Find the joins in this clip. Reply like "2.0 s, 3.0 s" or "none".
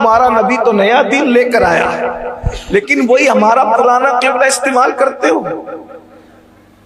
none